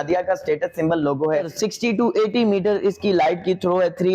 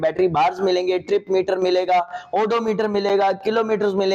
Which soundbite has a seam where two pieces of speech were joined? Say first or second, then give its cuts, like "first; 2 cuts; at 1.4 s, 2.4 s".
first; 1 cut; at 1.5 s